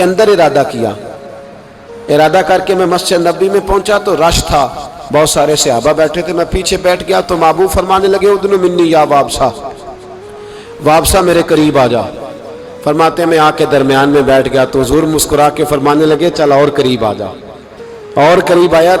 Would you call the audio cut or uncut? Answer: uncut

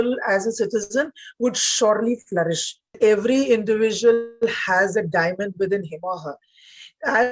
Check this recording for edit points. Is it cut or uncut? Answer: cut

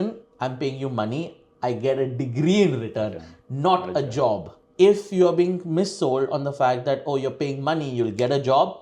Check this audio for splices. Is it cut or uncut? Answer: uncut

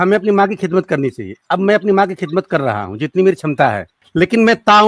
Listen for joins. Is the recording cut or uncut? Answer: cut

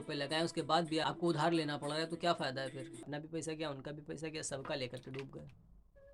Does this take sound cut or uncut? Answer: cut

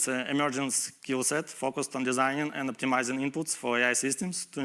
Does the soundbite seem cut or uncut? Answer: uncut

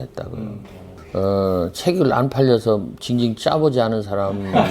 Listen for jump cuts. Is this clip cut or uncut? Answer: cut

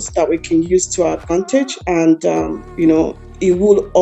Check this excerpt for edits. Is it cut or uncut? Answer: uncut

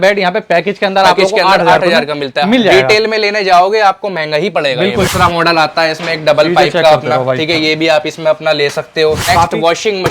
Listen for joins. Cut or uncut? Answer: cut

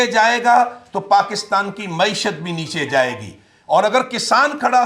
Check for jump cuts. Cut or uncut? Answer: uncut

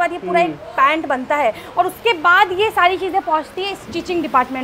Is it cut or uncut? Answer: uncut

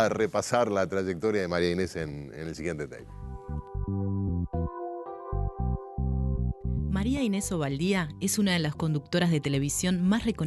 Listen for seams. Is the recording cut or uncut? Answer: cut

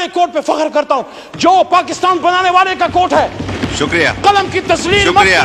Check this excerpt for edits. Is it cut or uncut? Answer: uncut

